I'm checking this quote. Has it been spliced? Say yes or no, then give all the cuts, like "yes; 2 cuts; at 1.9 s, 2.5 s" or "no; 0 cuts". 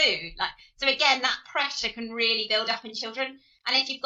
no; 0 cuts